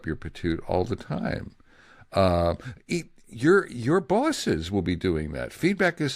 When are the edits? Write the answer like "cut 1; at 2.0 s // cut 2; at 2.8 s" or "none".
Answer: none